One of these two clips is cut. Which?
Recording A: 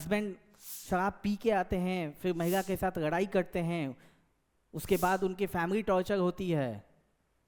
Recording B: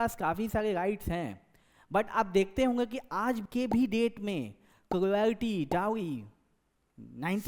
B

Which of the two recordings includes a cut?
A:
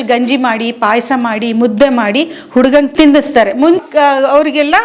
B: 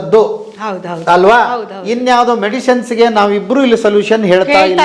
A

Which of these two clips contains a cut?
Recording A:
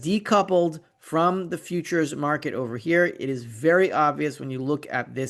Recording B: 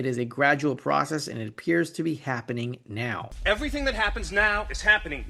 B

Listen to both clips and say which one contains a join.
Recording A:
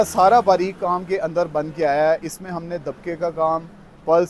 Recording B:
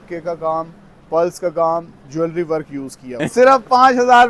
B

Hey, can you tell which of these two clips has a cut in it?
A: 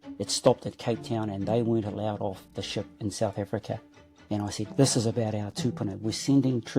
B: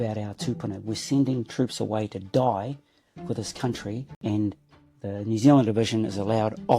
B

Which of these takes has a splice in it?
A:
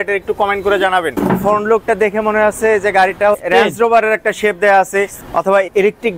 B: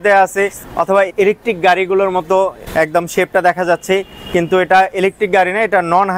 A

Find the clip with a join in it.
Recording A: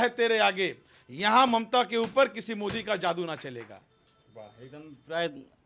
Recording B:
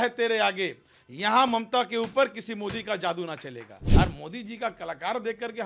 B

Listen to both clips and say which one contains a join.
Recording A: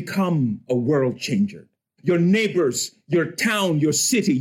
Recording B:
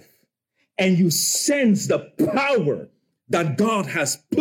A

